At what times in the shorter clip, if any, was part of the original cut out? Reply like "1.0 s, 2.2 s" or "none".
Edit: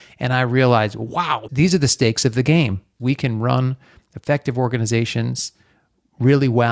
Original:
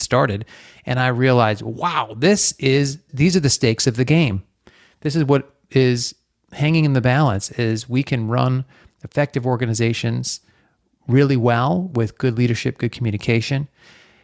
1.4 s, 3.0 s